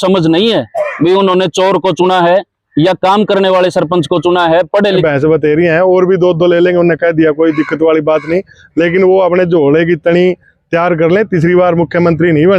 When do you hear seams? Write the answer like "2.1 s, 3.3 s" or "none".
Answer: 5.0 s